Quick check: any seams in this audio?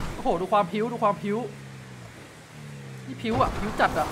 no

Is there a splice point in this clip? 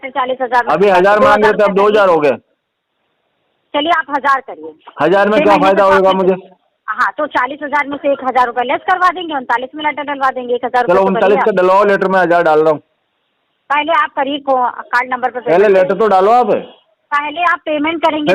no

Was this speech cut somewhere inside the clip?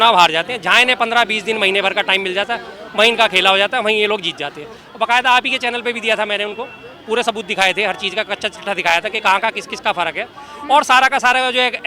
no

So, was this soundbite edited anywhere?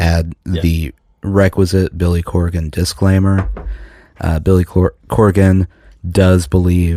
no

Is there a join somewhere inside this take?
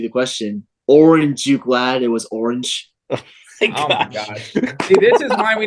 no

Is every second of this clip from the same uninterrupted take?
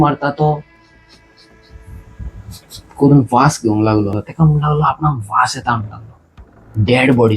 no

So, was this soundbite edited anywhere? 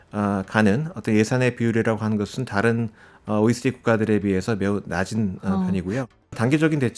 yes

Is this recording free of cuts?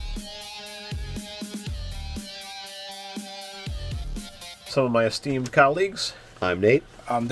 yes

